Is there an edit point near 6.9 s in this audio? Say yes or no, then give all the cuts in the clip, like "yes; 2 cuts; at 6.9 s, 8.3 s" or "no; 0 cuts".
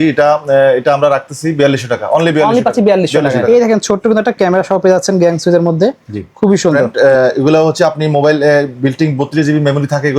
yes; 2 cuts; at 3.4 s, 6.9 s